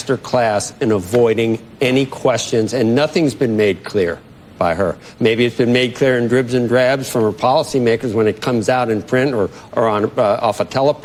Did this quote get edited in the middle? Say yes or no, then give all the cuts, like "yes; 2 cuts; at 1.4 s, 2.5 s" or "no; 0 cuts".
no; 0 cuts